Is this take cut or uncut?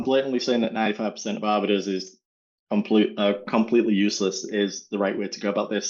uncut